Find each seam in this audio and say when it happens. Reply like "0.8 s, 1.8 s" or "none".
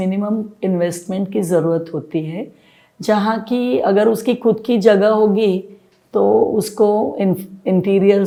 none

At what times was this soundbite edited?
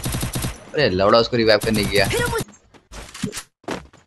2.5 s

